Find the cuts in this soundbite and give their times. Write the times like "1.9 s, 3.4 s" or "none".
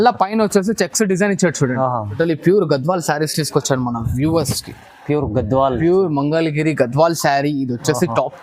2.2 s